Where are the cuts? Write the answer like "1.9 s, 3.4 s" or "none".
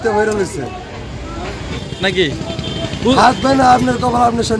1.7 s